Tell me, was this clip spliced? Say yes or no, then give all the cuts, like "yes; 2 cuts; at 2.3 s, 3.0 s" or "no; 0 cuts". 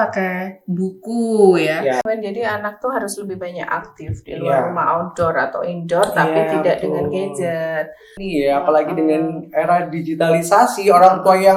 yes; 2 cuts; at 2.0 s, 8.2 s